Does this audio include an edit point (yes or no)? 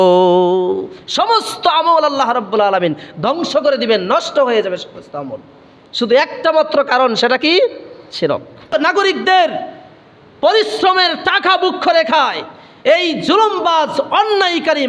yes